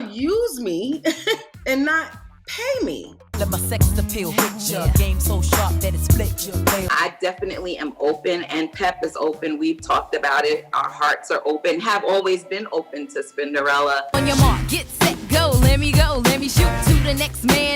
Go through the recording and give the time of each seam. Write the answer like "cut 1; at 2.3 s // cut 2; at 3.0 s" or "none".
cut 1; at 3.2 s // cut 2; at 6.9 s // cut 3; at 14.0 s